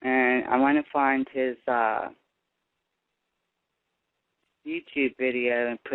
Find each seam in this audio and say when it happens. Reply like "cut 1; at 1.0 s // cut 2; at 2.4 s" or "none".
none